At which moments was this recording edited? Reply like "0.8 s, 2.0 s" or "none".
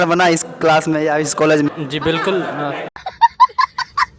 1.7 s, 2.9 s